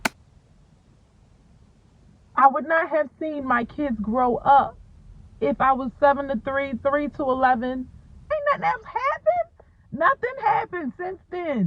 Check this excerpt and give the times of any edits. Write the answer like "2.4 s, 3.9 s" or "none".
8.2 s